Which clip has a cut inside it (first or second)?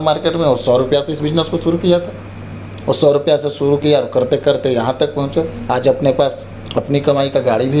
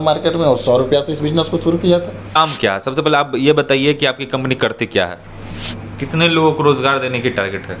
second